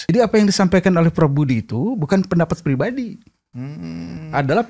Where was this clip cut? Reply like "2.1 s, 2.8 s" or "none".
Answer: none